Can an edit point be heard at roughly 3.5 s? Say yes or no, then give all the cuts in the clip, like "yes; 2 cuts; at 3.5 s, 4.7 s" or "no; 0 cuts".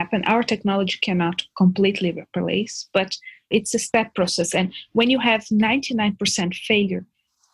yes; 1 cut; at 3.5 s